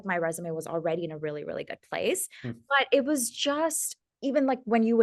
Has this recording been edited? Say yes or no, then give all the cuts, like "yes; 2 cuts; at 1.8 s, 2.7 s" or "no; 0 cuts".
no; 0 cuts